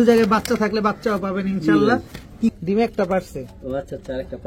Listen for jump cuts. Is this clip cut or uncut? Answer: cut